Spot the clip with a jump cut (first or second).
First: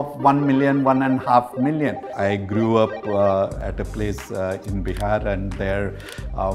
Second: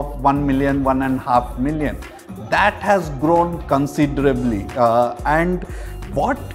first